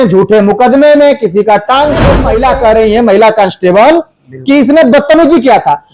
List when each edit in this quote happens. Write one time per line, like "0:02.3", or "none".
0:02.3